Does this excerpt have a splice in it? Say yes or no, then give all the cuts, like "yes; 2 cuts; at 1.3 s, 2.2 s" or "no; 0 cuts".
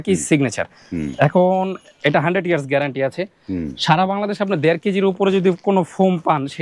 no; 0 cuts